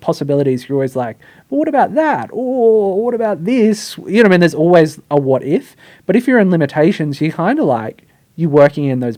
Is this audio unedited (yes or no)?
yes